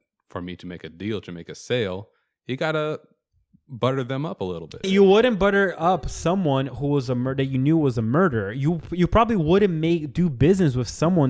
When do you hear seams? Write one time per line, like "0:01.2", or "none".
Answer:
0:04.8